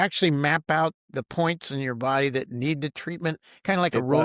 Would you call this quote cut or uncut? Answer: cut